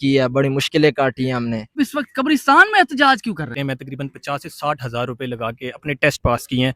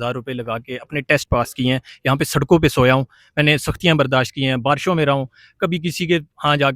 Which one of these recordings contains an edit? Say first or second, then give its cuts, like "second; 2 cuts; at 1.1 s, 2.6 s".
first; 2 cuts; at 1.8 s, 3.7 s